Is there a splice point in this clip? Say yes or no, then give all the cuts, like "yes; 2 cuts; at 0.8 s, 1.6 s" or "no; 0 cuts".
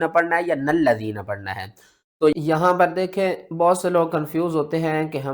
yes; 1 cut; at 2.3 s